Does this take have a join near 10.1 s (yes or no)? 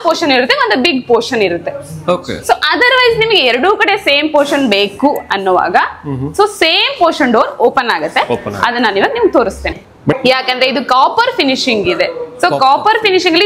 yes